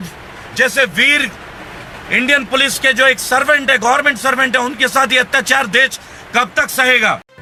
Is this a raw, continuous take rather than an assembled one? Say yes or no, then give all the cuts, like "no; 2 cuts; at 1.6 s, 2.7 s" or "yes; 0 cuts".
yes; 0 cuts